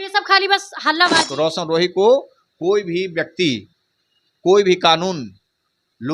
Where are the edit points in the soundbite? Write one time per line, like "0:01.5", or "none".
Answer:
0:01.3